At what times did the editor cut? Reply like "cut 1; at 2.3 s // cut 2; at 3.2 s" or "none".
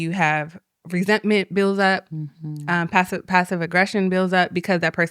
none

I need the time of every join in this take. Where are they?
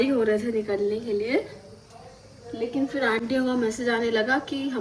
none

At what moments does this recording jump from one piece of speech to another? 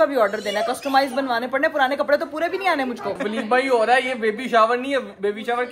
cut 1; at 3.2 s

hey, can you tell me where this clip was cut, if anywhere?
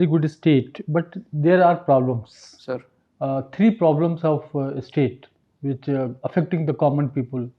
none

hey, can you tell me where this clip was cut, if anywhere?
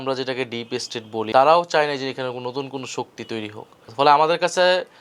cut 1; at 1.2 s // cut 2; at 3.8 s

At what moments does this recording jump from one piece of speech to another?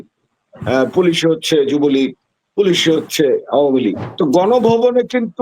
cut 1; at 4.1 s

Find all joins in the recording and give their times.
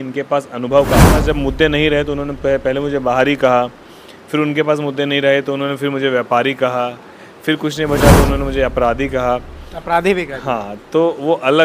cut 1; at 1.2 s

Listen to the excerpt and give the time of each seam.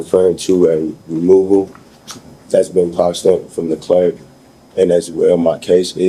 none

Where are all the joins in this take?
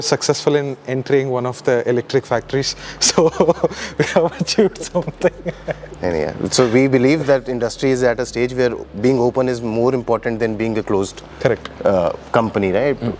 none

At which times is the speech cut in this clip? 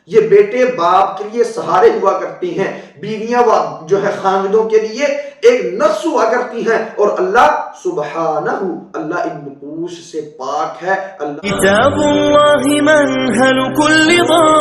cut 1; at 11.1 s

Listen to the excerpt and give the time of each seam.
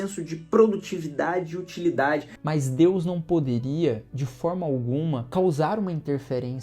cut 1; at 2.3 s // cut 2; at 5.2 s

